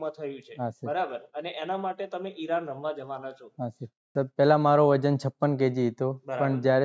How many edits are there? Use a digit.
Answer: 1